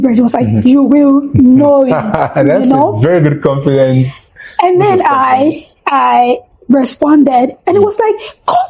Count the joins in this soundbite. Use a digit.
0